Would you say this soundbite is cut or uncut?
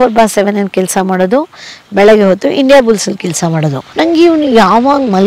cut